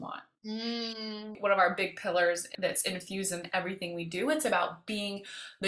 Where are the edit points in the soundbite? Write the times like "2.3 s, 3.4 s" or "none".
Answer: 1.3 s

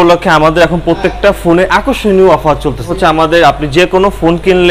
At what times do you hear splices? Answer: 2.8 s

